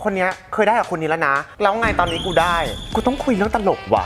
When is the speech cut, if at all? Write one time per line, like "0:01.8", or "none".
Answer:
0:01.4
0:02.9